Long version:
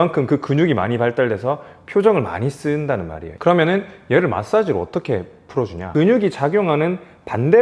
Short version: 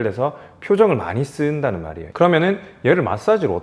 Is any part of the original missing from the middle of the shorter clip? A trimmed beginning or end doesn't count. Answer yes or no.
no